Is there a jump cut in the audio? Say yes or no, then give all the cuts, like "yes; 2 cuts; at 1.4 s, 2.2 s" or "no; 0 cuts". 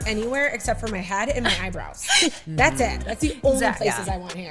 no; 0 cuts